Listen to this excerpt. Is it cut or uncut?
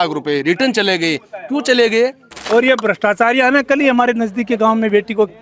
cut